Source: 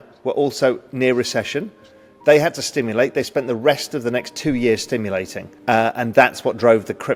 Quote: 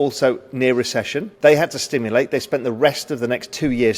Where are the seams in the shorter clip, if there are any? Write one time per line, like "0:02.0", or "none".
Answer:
0:01.2

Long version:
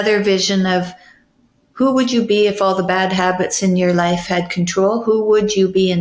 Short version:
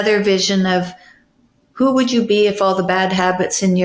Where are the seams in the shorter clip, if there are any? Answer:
none

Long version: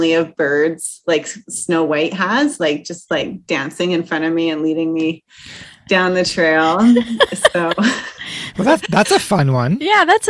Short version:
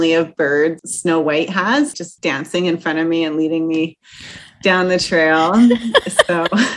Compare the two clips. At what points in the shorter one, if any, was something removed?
0:00.9
0:02.0

